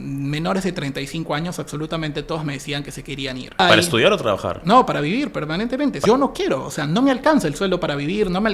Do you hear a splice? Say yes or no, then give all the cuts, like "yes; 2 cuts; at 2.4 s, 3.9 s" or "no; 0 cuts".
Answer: yes; 2 cuts; at 3.6 s, 6.0 s